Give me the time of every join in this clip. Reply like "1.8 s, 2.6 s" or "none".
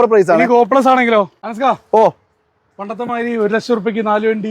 1.4 s